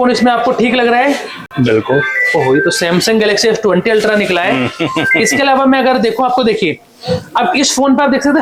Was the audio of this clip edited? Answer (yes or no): no